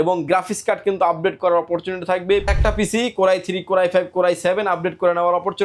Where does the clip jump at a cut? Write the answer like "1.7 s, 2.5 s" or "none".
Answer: 2.5 s